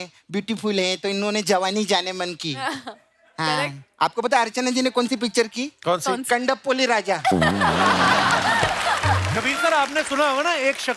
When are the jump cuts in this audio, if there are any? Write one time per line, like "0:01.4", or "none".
0:09.3